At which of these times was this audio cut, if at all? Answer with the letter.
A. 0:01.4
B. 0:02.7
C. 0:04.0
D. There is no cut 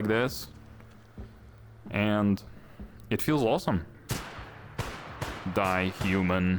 C